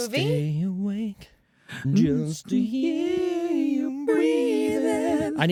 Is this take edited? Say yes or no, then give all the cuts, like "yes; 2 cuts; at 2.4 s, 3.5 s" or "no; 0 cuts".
no; 0 cuts